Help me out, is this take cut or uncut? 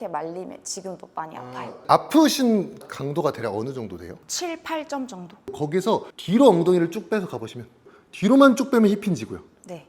cut